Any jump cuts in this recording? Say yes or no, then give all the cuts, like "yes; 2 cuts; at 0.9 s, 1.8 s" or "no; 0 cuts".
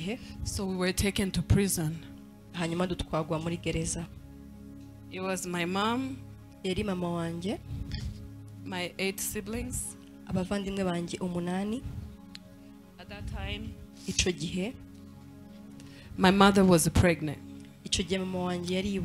no; 0 cuts